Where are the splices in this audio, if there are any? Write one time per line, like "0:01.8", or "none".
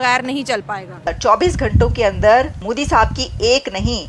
0:01.1
0:02.6